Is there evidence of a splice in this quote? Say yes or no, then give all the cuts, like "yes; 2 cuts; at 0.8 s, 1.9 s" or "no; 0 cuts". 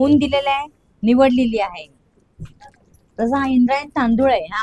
no; 0 cuts